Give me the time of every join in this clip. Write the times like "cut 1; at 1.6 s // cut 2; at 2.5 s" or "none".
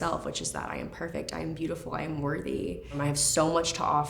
cut 1; at 3.0 s